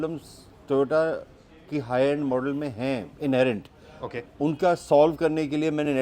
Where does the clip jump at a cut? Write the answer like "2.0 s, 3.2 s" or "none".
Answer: none